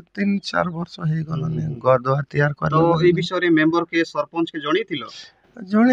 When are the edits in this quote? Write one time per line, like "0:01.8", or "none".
none